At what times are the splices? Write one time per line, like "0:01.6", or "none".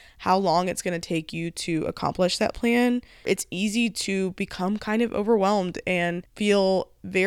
0:03.3
0:06.2